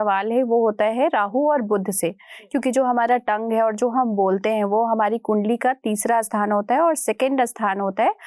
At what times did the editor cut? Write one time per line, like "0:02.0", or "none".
none